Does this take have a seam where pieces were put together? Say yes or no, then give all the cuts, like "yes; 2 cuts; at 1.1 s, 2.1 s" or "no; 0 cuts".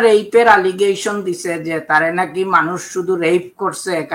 no; 0 cuts